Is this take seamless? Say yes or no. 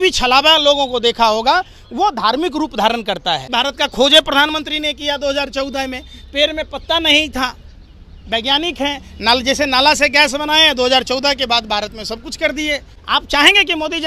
no